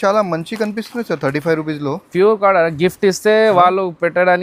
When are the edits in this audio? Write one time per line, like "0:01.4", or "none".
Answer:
none